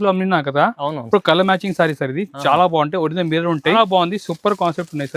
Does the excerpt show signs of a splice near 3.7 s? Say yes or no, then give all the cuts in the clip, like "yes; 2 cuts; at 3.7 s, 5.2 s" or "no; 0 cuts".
yes; 1 cut; at 3.7 s